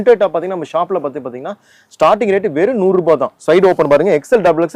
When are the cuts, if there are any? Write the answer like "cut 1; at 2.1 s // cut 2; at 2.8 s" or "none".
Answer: none